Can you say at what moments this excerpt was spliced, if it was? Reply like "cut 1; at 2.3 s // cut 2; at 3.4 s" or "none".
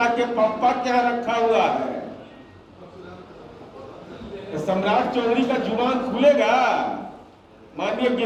none